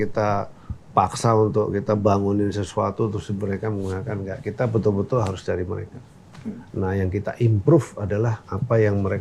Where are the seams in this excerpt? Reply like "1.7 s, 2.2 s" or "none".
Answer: none